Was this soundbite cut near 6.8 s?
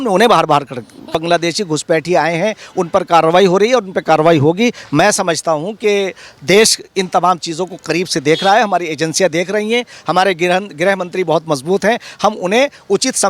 no; 1 cut; at 1.1 s

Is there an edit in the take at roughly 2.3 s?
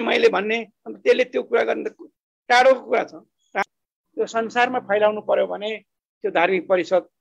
no; 2 cuts; at 3.5 s, 4.9 s

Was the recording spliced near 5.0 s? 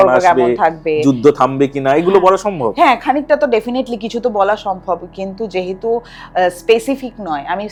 no; 0 cuts

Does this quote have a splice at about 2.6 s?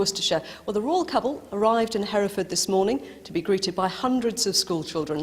yes; 1 cut; at 2.6 s

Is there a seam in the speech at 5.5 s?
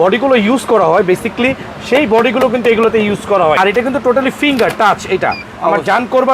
yes; 2 cuts; at 3.6 s, 5.5 s

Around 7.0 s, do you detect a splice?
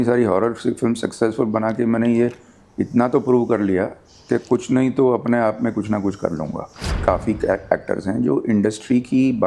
yes; 1 cut; at 7.0 s

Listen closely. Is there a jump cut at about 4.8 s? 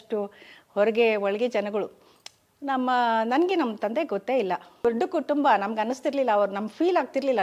yes; 1 cut; at 4.8 s

